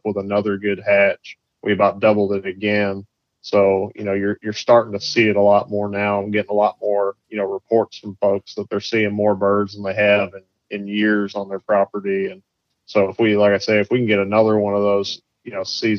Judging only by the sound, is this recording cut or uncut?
uncut